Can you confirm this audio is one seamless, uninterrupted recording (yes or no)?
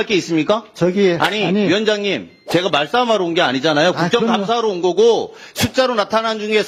yes